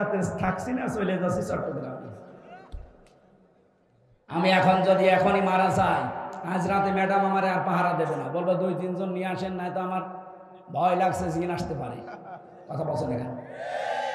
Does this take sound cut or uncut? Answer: uncut